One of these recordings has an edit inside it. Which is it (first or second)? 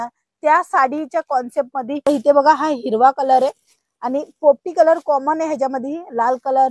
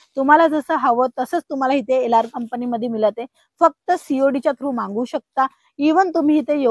first